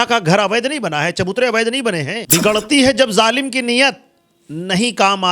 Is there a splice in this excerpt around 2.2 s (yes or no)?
yes